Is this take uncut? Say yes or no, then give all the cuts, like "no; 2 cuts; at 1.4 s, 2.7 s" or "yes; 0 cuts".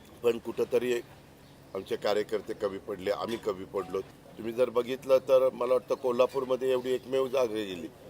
no; 1 cut; at 4.1 s